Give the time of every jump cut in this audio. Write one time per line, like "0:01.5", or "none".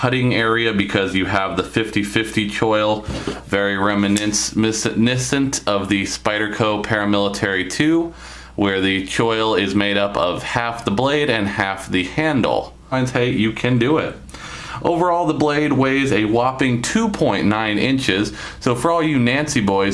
none